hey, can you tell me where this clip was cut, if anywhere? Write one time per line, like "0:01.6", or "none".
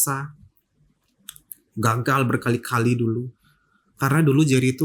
none